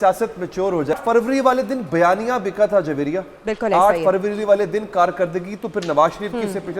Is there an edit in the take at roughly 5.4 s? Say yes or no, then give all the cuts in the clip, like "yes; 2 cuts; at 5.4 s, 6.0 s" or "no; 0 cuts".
no; 1 cut; at 1.0 s